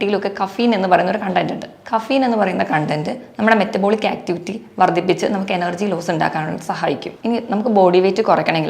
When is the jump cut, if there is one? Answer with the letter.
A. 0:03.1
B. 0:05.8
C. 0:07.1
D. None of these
C